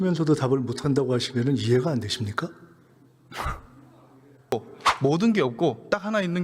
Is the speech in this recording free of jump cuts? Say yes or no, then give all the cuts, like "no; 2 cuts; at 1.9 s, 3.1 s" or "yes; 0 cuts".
no; 1 cut; at 4.5 s